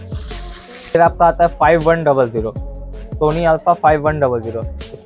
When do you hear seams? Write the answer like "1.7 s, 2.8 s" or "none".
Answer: 0.9 s